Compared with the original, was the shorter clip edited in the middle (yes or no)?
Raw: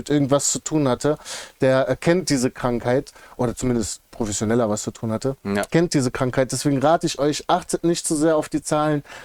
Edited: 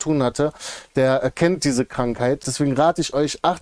yes